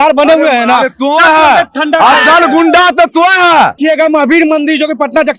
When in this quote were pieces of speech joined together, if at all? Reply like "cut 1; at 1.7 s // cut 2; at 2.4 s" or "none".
cut 1; at 3.8 s